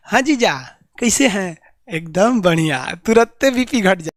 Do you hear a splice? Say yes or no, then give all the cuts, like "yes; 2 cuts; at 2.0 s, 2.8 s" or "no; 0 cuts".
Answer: no; 0 cuts